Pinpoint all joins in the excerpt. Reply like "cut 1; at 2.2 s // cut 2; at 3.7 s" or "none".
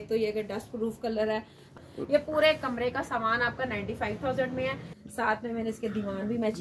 cut 1; at 1.6 s // cut 2; at 4.9 s